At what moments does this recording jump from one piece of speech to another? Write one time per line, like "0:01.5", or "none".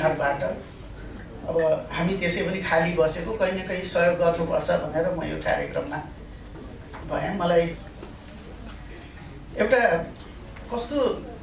none